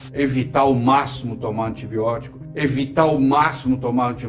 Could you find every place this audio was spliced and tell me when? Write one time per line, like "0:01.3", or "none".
none